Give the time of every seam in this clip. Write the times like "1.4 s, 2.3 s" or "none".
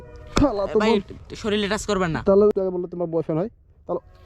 2.5 s